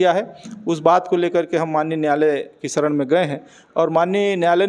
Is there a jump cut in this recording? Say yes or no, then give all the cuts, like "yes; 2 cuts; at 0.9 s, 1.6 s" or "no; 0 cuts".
no; 0 cuts